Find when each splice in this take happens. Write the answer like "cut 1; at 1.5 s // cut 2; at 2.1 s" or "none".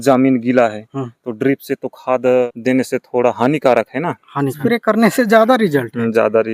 cut 1; at 2.5 s // cut 2; at 4.5 s

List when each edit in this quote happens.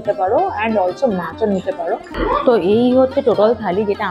cut 1; at 2.1 s

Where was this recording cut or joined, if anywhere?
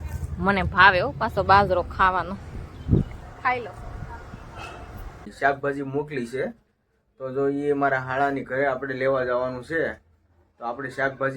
cut 1; at 5.2 s

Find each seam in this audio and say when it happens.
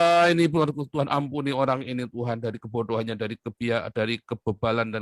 none

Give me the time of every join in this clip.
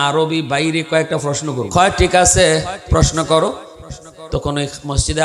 cut 1; at 1.7 s

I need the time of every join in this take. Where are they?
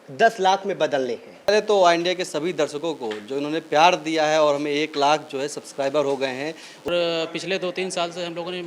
cut 1; at 1.5 s // cut 2; at 6.8 s

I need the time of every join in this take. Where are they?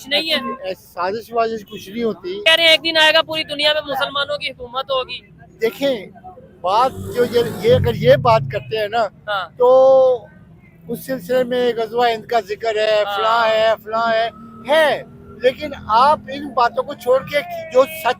cut 1; at 2.4 s

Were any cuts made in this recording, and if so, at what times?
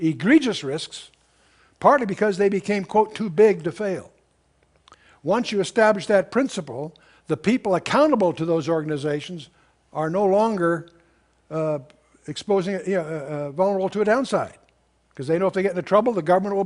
cut 1; at 11.7 s

